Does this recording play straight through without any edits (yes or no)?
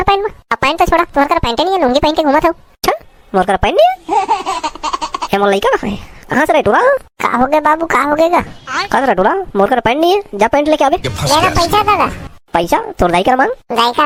yes